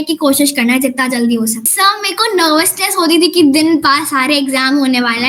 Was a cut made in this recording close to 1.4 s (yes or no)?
yes